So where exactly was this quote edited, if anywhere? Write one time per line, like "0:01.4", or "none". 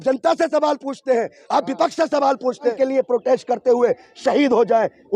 0:02.8